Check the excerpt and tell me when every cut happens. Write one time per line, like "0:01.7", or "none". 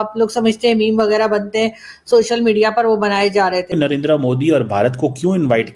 0:03.7